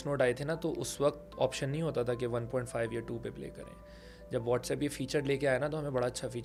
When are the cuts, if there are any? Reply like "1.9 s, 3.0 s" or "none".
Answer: none